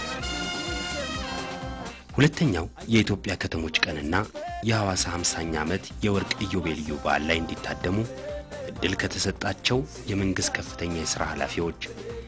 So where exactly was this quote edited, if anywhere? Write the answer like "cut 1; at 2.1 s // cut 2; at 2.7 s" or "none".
none